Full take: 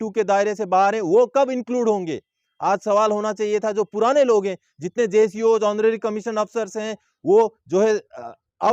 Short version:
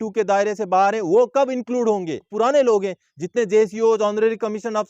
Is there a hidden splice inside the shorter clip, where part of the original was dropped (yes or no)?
yes